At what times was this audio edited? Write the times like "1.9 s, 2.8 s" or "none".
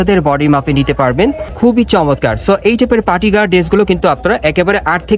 1.5 s